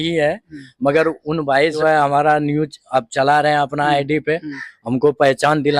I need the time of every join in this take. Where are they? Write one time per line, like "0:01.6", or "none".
0:01.8